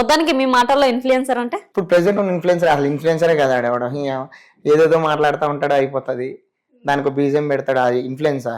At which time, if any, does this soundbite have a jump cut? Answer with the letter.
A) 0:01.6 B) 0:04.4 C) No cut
A